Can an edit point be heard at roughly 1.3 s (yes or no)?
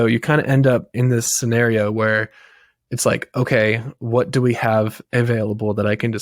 yes